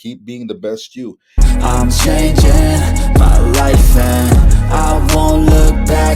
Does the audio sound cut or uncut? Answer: cut